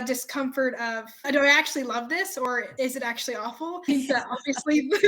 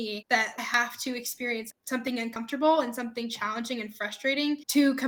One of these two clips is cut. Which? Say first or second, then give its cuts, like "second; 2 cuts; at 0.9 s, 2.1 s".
first; 3 cuts; at 1.2 s, 2.7 s, 3.8 s